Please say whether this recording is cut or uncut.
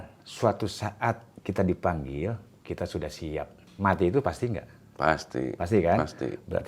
cut